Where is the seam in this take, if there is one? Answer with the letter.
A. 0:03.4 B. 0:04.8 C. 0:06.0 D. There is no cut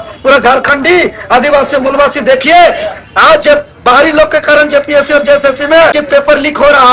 C